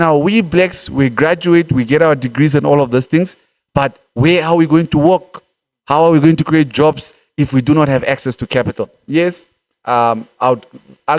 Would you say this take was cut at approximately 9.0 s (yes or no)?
yes